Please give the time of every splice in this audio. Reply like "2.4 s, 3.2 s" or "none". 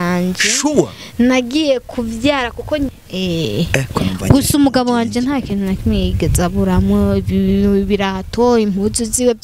2.9 s